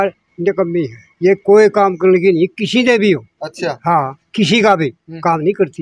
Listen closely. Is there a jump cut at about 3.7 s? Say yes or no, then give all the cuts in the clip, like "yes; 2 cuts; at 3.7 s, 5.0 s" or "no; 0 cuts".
no; 0 cuts